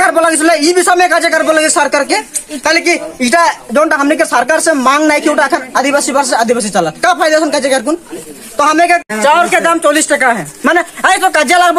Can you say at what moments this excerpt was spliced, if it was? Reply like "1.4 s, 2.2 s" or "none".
9.1 s